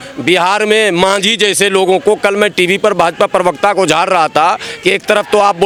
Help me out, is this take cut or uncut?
uncut